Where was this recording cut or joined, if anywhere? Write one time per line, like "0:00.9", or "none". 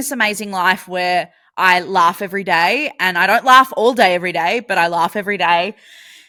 none